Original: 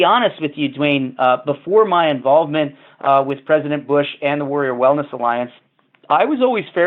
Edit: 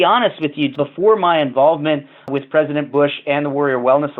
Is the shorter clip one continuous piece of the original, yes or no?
no